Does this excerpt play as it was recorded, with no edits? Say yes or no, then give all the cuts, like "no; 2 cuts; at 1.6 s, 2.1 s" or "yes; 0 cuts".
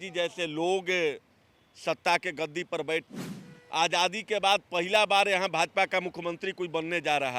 no; 1 cut; at 3.1 s